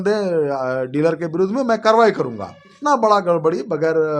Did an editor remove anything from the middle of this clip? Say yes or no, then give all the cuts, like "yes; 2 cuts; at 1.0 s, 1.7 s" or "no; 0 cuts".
yes; 1 cut; at 2.7 s